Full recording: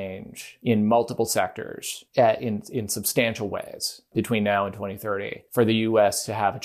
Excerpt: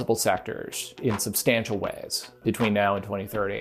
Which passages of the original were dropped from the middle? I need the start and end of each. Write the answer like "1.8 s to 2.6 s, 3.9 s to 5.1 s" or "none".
2.0 s to 2.6 s